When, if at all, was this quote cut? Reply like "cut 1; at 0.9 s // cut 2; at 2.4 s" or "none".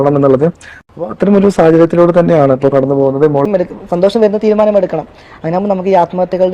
cut 1; at 3.4 s